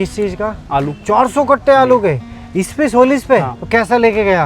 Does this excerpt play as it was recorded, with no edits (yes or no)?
no